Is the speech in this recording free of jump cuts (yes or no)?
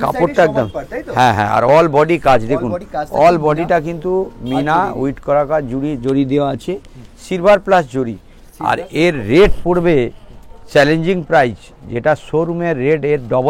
yes